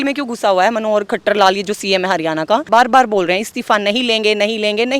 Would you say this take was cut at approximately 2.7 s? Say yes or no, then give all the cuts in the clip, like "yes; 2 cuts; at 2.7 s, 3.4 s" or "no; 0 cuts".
yes; 1 cut; at 2.7 s